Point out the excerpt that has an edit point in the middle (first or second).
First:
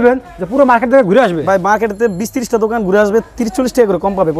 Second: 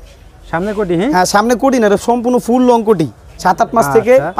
second